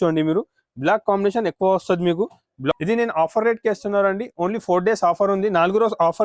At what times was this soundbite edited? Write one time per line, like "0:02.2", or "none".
0:02.7